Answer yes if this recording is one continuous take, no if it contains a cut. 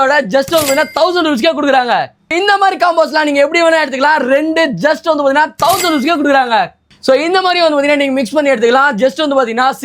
yes